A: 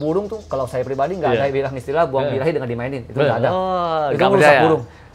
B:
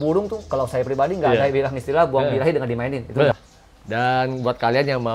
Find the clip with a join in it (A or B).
B